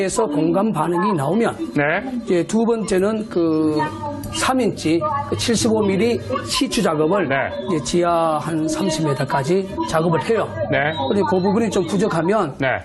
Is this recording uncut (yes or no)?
no